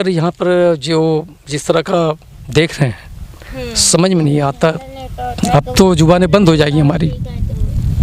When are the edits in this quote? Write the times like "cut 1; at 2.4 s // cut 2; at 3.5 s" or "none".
none